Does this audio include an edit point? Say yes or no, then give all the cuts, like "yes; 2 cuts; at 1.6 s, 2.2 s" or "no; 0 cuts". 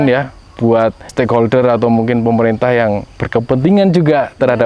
yes; 1 cut; at 1.0 s